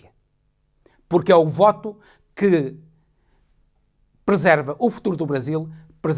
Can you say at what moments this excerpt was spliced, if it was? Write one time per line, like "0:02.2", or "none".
none